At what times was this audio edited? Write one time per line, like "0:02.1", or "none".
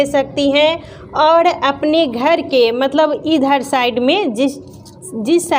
none